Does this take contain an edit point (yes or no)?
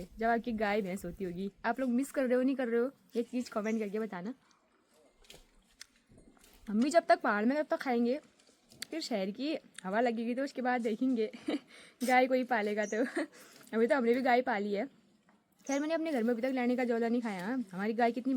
no